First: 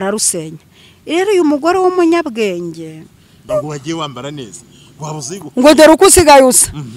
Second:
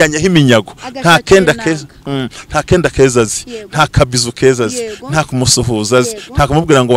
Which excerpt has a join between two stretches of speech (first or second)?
first